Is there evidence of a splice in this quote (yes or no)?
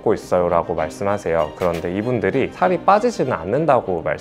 yes